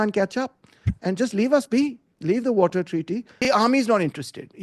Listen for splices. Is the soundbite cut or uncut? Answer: cut